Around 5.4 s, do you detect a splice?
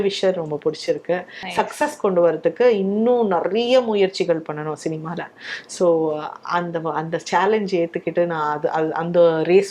no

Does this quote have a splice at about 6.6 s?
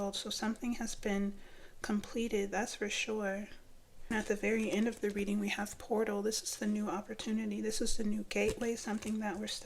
no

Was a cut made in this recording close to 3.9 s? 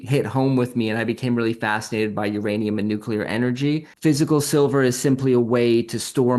yes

